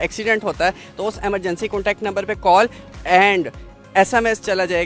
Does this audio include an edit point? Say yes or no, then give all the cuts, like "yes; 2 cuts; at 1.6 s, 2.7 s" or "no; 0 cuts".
no; 0 cuts